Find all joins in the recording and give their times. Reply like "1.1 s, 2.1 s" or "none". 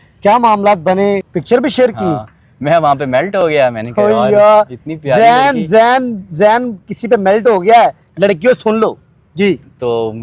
1.3 s